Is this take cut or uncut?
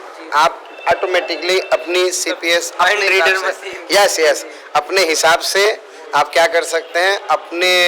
uncut